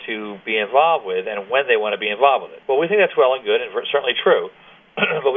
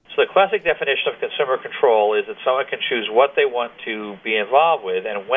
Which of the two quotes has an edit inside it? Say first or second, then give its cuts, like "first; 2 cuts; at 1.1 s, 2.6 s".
first; 1 cut; at 2.5 s